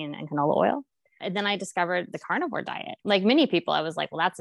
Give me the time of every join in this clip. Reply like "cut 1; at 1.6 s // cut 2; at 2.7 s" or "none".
cut 1; at 1.2 s // cut 2; at 2.9 s